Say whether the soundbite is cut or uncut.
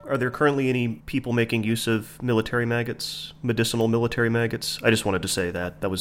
uncut